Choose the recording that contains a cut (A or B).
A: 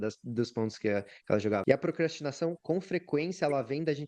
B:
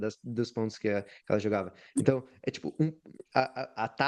A